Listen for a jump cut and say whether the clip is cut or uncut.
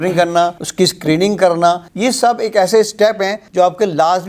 uncut